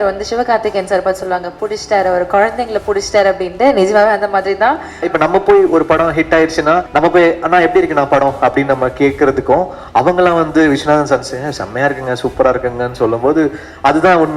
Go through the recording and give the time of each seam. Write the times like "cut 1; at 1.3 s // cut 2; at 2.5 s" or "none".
cut 1; at 5.1 s // cut 2; at 6.9 s